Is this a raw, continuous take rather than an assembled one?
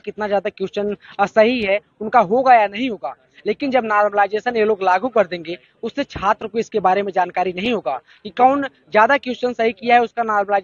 yes; 0 cuts

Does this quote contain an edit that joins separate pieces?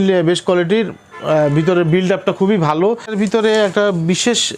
yes; 1 cut; at 3.1 s

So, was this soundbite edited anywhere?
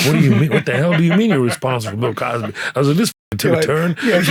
no; 0 cuts

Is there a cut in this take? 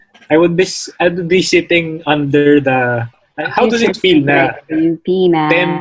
yes; 1 cut; at 3.2 s

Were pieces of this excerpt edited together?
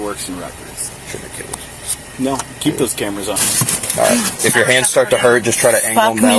yes; 2 cuts; at 0.9 s, 3.4 s

